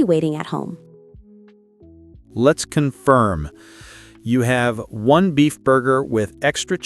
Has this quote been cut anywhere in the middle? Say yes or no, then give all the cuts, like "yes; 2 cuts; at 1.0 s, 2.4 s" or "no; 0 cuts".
yes; 2 cuts; at 0.8 s, 2.3 s